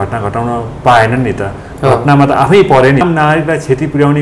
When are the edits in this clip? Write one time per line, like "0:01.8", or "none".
0:03.0